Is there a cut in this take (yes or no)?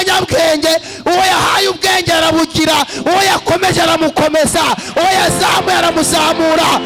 no